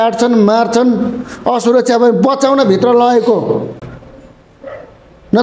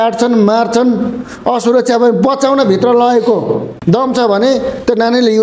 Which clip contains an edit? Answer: second; 1 cut; at 3.7 s

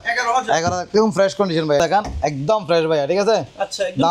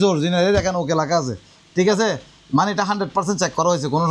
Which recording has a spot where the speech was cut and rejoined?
first; 1 cut; at 1.8 s

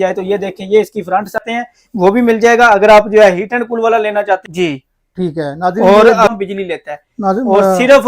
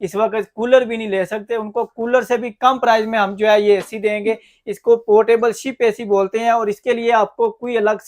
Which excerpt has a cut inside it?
first; 3 cuts; at 1.4 s, 4.5 s, 6.3 s

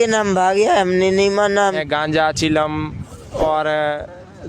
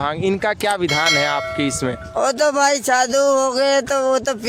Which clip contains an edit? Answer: first; 1 cut; at 1.8 s

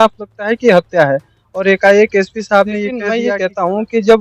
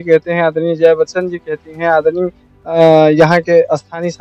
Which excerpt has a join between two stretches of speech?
first; 1 cut; at 3.1 s

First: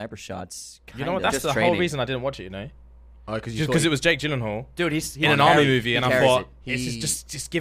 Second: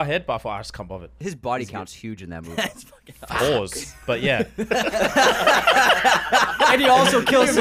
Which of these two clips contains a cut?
second; 1 cut; at 1.1 s

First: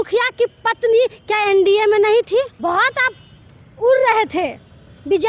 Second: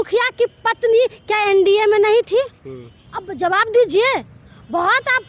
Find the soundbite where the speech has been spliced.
first; 1 cut; at 2.5 s

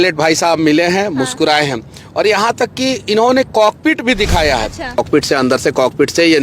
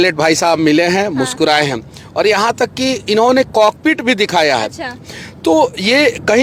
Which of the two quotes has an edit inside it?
first; 1 cut; at 5.0 s

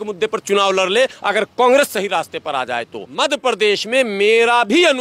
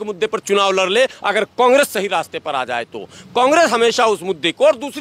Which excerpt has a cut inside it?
first; 1 cut; at 3.0 s

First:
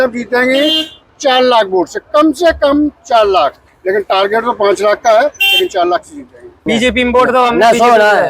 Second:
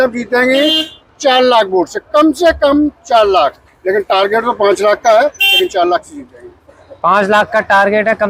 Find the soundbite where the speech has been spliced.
first; 1 cut; at 6.5 s

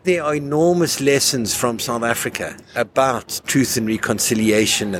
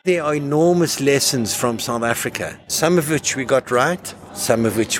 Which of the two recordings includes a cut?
second; 1 cut; at 2.6 s

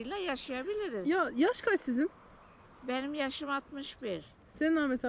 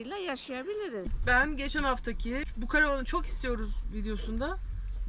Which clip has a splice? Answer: second; 1 cut; at 1.0 s

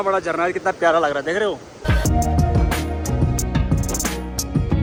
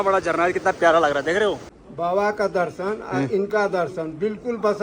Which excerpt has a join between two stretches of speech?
second; 1 cut; at 1.7 s

